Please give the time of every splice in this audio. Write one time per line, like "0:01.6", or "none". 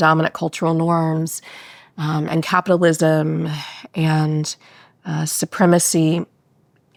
none